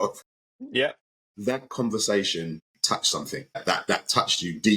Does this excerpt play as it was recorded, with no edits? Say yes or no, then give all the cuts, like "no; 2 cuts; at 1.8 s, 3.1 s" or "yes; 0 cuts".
no; 2 cuts; at 1.2 s, 2.7 s